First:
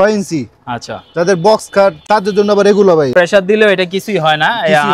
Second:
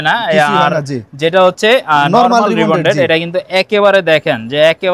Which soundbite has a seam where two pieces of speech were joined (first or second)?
first